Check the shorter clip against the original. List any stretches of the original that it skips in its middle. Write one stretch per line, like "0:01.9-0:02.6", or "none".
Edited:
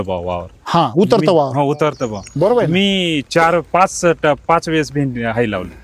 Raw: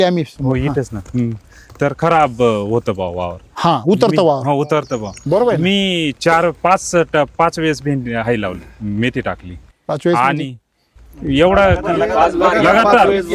none

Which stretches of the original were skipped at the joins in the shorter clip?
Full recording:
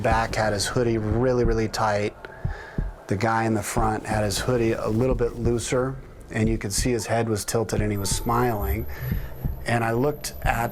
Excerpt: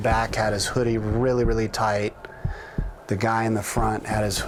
none

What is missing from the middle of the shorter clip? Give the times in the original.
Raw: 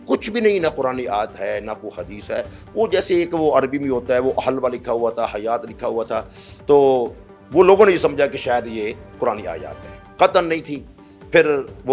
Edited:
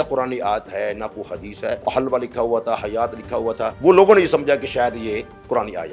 0:02.5-0:04.3
0:06.2-0:07.4

